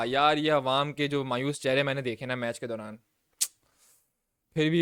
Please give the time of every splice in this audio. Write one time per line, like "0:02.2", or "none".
none